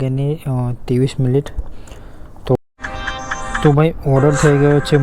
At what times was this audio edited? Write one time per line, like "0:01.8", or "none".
0:02.6

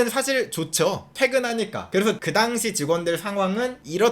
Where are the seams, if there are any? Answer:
none

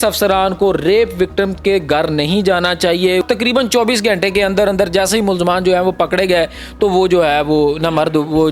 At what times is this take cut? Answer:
0:03.2

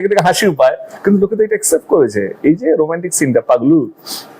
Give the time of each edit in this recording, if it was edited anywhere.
none

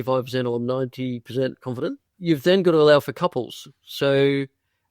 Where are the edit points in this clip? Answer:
0:02.1

